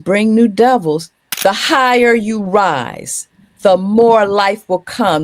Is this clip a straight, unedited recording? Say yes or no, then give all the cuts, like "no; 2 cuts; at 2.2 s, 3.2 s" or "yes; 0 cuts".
no; 1 cut; at 1.2 s